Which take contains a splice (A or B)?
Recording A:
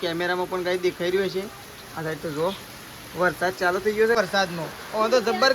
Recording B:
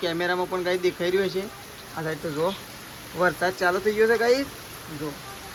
A